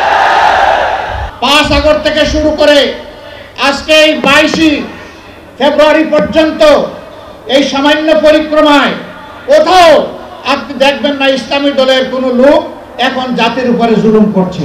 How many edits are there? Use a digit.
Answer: 1